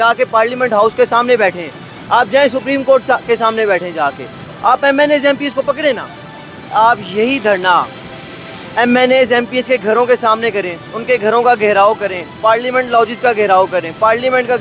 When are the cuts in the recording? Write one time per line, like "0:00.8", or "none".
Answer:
0:06.7